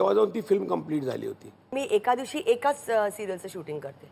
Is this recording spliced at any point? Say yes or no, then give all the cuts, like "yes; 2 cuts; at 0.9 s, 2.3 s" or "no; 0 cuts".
yes; 1 cut; at 1.7 s